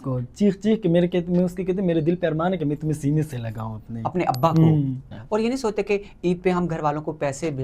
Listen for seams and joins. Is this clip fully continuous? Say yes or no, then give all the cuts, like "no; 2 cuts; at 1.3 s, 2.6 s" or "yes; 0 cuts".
no; 1 cut; at 5.0 s